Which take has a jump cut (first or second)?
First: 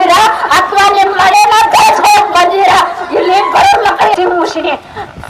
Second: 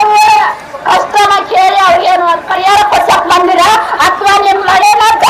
first